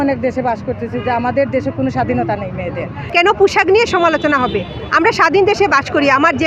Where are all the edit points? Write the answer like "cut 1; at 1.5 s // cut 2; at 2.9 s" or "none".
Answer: cut 1; at 3.0 s